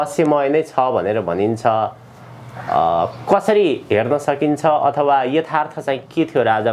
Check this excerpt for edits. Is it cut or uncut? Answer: uncut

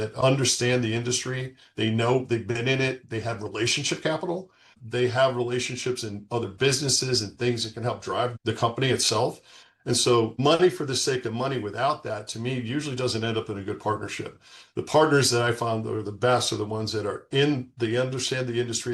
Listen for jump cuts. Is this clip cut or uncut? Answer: cut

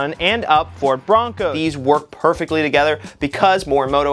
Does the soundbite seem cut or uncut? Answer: cut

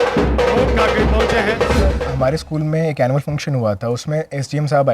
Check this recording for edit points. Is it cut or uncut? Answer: cut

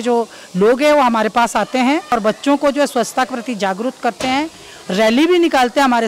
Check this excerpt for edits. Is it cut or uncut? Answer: cut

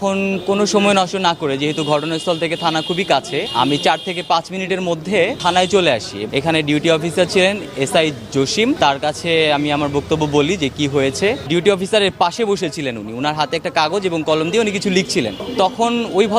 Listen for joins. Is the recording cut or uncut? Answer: cut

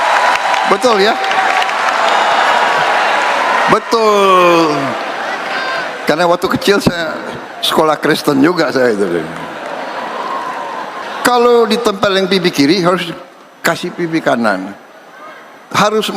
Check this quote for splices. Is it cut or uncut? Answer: cut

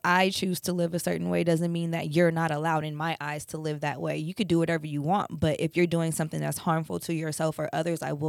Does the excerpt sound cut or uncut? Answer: uncut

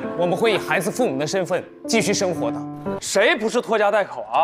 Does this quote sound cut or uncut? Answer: cut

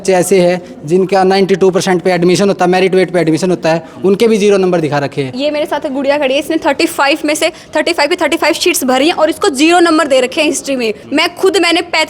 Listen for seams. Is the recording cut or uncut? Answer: cut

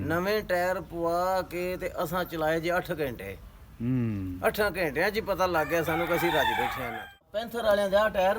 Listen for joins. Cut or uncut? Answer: cut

